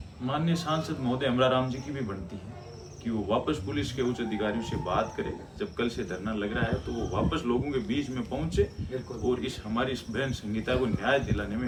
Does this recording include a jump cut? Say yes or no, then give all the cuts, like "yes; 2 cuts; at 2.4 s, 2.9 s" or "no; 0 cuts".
no; 0 cuts